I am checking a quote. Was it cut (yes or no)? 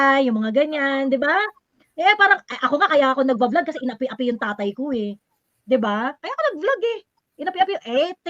no